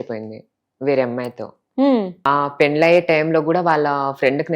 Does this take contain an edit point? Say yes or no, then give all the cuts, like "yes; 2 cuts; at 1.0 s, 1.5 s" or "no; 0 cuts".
yes; 1 cut; at 2.3 s